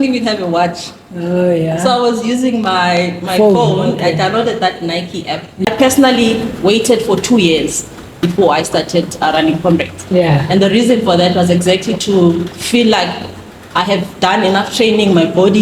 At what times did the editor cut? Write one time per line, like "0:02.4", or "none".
0:05.7